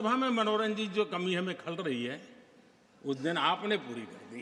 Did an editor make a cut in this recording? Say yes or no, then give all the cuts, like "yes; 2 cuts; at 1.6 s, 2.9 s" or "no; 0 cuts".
no; 0 cuts